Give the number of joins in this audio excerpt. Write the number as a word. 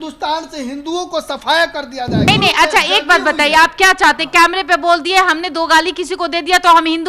one